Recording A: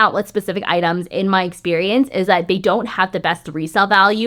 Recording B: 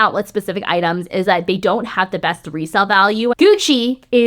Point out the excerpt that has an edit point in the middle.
B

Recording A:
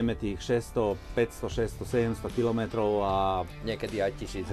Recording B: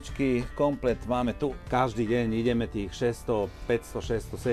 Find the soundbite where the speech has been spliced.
B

